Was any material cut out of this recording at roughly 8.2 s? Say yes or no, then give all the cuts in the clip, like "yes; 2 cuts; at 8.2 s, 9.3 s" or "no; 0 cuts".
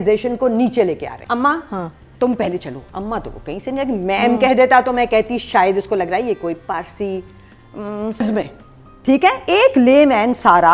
yes; 2 cuts; at 1.2 s, 8.2 s